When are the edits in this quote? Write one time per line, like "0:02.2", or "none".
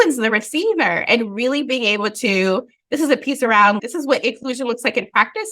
0:03.8